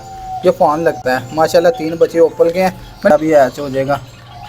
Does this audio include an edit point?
yes; 1 cut; at 3.1 s

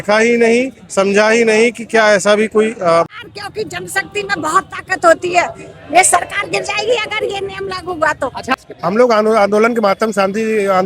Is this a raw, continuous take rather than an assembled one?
no; 2 cuts; at 3.1 s, 8.5 s

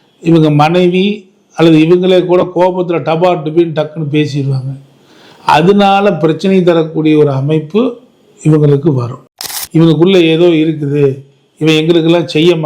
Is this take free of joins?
no; 1 cut; at 9.2 s

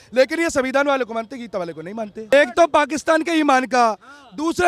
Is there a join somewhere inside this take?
yes; 1 cut; at 2.3 s

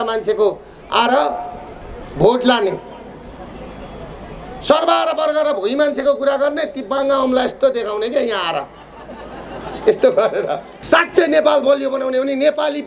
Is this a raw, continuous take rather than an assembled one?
no; 1 cut; at 10.7 s

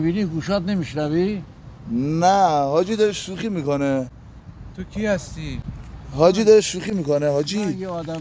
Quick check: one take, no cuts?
yes; 0 cuts

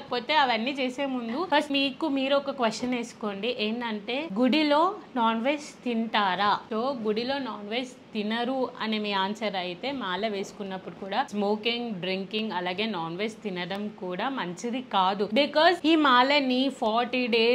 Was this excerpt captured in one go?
yes; 0 cuts

